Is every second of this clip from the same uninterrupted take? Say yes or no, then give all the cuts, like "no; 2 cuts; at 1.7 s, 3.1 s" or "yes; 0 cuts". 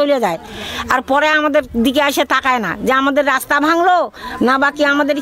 yes; 0 cuts